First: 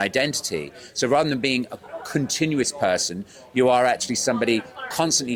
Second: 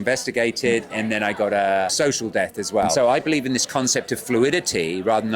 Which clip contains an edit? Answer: second; 3 cuts; at 0.9 s, 1.9 s, 2.9 s

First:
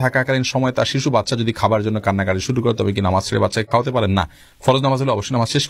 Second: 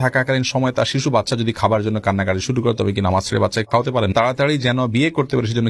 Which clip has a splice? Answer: second; 1 cut; at 4.1 s

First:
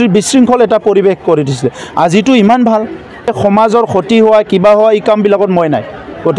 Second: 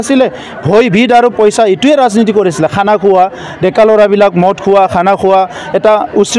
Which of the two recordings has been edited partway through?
first; 1 cut; at 3.4 s

